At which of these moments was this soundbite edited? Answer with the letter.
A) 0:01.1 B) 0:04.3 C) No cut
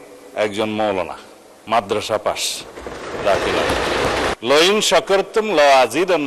B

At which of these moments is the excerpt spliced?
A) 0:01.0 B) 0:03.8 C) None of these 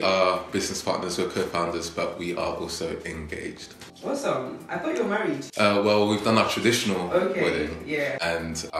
C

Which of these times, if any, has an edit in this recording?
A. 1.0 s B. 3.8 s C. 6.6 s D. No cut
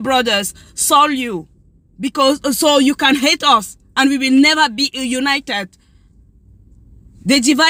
D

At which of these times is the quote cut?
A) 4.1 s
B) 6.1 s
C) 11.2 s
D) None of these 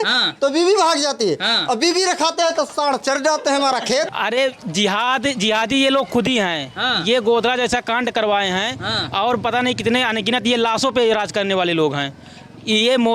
A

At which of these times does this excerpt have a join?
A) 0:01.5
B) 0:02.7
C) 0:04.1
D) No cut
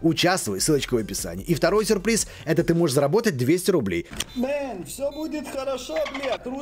C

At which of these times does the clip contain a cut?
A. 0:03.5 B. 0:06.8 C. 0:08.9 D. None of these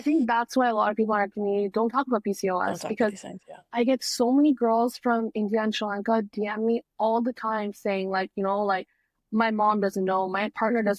D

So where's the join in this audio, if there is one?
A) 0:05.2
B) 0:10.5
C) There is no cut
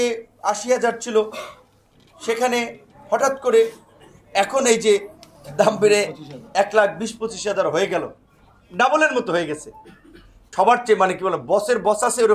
B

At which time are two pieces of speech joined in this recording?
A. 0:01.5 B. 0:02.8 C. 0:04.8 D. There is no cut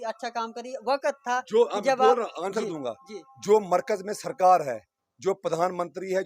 D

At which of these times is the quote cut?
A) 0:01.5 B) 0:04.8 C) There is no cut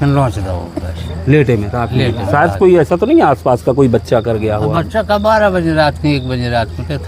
C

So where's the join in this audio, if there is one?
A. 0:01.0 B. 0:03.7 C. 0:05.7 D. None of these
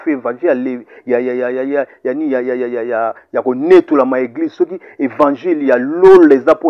D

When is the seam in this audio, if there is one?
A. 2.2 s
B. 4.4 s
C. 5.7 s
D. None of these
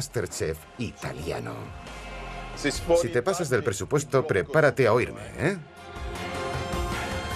A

